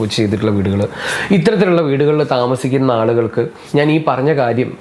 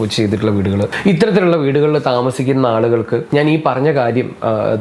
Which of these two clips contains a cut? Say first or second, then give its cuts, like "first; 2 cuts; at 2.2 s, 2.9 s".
second; 2 cuts; at 0.9 s, 3.2 s